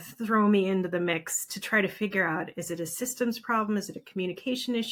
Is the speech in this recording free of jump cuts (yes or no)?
yes